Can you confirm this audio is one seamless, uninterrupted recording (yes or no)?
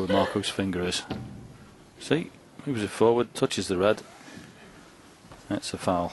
yes